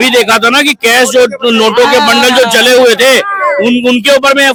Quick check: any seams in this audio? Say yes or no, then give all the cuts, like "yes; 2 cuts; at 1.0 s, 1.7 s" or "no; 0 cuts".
no; 0 cuts